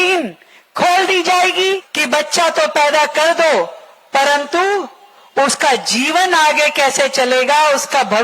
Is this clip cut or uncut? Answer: cut